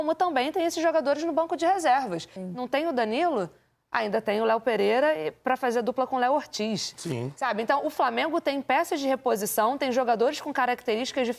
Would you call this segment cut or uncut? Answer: cut